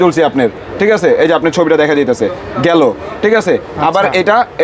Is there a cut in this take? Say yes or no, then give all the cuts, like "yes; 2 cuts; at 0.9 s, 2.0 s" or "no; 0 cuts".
no; 0 cuts